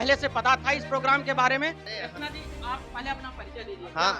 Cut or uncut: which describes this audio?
uncut